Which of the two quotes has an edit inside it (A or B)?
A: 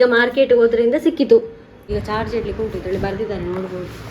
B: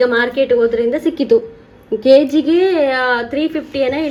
A